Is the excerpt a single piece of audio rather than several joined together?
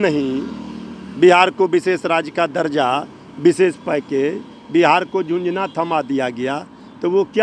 yes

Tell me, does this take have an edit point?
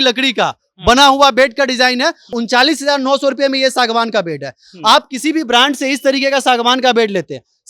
yes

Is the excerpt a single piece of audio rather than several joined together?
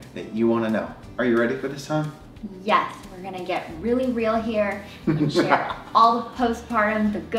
yes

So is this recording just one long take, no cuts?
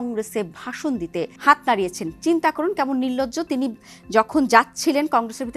no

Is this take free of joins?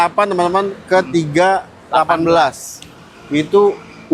yes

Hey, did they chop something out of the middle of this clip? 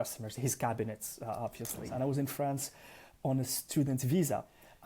yes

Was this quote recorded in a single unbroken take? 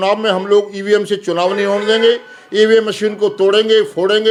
yes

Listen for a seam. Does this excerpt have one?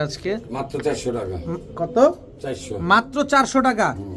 no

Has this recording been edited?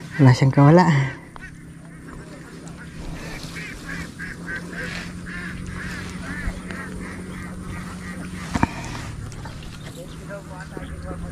no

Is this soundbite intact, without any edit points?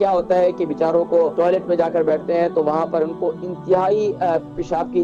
no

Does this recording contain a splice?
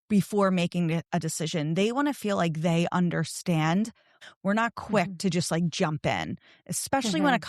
yes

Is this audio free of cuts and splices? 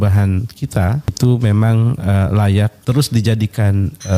no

